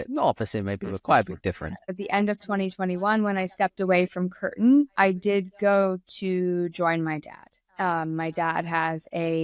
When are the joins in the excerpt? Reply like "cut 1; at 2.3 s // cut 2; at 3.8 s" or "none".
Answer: cut 1; at 1.9 s

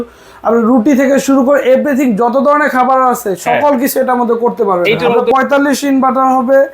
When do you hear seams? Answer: cut 1; at 5.1 s

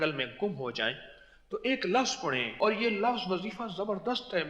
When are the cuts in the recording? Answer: cut 1; at 2.6 s

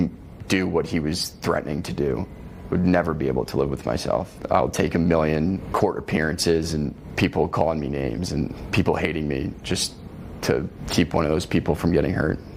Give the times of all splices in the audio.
cut 1; at 4.3 s // cut 2; at 5.6 s // cut 3; at 7.0 s // cut 4; at 8.6 s // cut 5; at 10.8 s

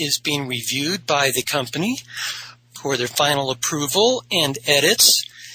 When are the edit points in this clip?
none

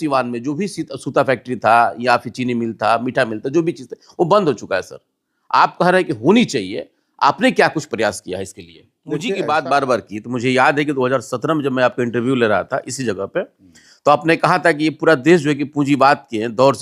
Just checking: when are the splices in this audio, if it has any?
cut 1; at 9.2 s

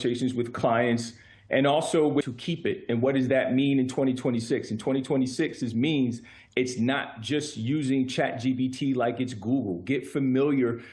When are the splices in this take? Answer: cut 1; at 2.3 s

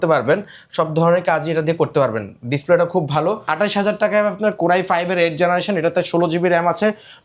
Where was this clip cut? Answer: cut 1; at 3.5 s

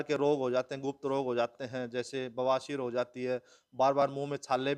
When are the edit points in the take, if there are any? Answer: none

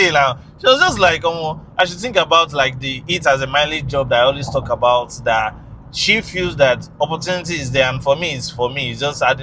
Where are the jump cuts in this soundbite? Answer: none

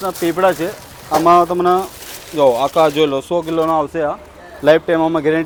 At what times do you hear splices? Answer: none

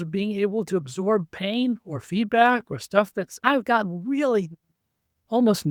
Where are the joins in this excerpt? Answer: none

